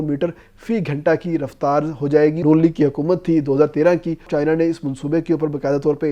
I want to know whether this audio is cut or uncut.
cut